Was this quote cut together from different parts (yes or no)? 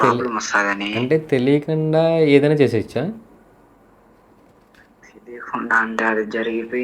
no